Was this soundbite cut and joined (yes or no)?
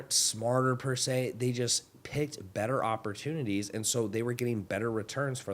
no